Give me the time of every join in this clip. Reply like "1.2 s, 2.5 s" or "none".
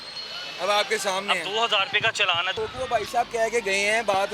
2.6 s